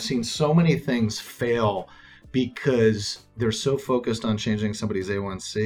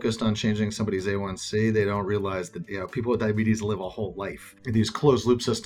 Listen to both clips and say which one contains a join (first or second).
second